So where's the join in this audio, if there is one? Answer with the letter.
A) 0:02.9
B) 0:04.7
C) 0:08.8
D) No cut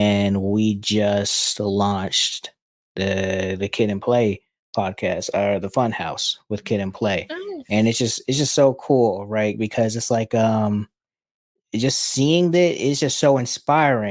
D